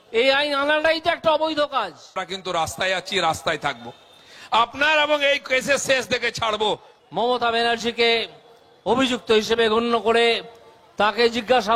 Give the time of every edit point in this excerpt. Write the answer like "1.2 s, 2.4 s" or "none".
2.2 s, 6.9 s